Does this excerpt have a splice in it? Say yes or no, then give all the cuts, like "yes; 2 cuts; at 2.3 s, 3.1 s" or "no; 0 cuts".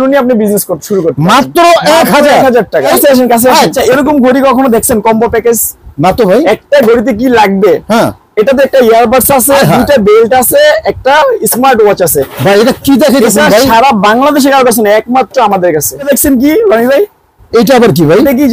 yes; 3 cuts; at 2.9 s, 3.8 s, 16.1 s